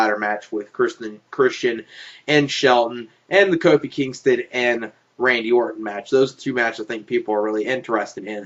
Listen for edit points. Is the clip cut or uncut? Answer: uncut